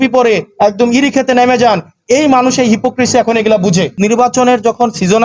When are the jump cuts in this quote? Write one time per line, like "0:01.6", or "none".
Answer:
0:03.9